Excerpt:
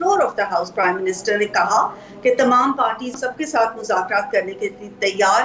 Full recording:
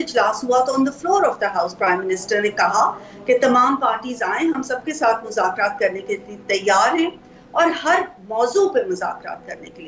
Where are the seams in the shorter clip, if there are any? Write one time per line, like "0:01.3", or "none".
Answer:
0:03.1